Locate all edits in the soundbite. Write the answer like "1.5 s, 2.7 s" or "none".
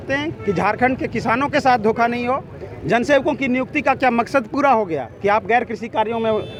none